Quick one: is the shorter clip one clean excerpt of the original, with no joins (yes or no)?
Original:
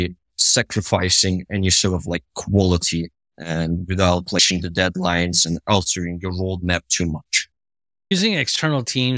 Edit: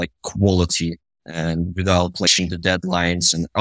yes